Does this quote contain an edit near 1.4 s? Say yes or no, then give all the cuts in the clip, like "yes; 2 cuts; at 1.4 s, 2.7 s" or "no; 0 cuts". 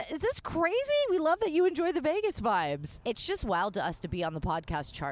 no; 1 cut; at 2.9 s